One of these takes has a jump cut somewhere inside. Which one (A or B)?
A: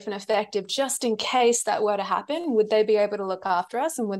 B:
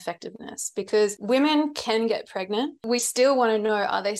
B